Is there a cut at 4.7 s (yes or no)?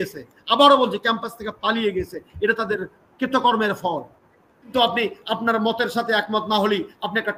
yes